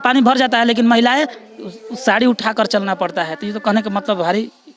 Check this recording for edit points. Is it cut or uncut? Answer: uncut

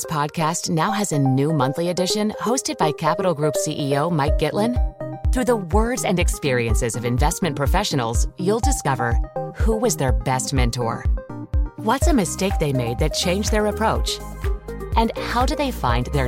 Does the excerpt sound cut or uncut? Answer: uncut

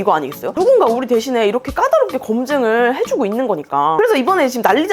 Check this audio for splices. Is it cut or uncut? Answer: cut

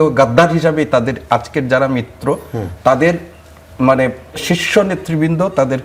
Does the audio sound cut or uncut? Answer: uncut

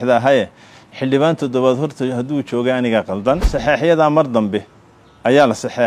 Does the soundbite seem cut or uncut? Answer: cut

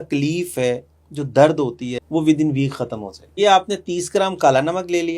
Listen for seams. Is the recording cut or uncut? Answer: cut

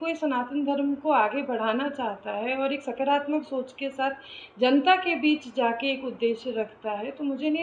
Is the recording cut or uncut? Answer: uncut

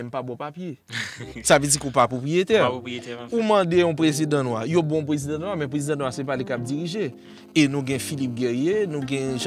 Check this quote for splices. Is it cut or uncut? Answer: uncut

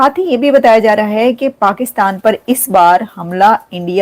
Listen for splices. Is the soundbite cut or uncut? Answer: uncut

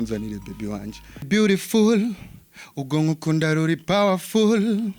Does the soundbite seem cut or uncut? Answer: cut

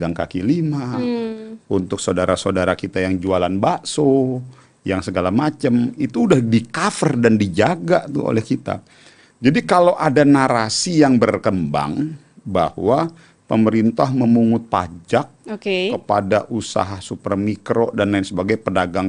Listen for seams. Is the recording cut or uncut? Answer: uncut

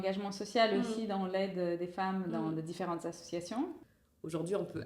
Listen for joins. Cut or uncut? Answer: cut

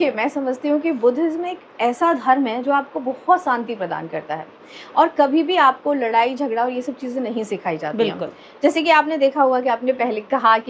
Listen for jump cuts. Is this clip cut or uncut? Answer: uncut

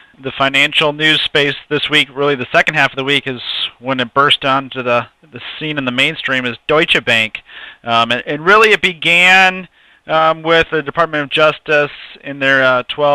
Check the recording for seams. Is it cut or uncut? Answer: uncut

